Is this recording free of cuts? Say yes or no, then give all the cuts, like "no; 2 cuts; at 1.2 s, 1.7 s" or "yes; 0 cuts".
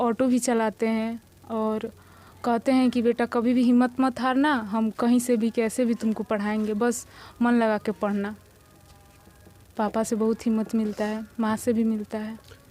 yes; 0 cuts